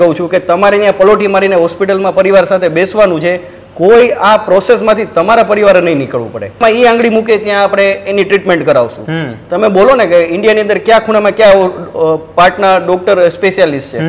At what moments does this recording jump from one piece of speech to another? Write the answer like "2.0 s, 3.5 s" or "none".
6.6 s